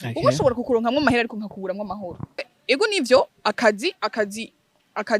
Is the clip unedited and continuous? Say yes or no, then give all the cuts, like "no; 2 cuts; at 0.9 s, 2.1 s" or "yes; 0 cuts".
no; 1 cut; at 2.5 s